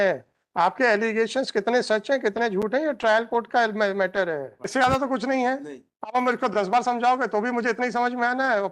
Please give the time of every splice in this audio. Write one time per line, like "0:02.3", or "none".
0:04.6